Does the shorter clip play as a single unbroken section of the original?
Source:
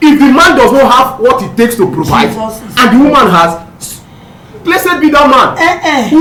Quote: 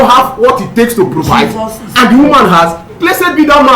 no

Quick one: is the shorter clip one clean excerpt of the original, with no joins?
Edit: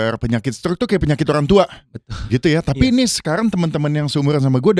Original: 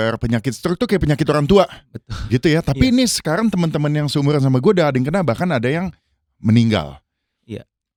yes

